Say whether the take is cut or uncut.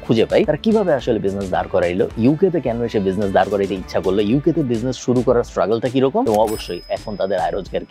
uncut